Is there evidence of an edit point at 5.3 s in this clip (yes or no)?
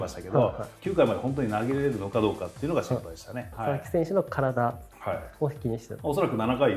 no